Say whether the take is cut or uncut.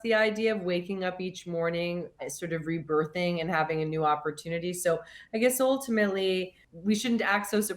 cut